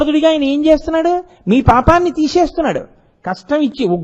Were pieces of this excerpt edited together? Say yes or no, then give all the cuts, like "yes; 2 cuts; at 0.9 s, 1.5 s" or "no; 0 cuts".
no; 0 cuts